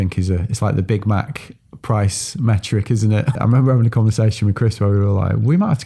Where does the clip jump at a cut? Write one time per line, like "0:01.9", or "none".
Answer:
0:03.4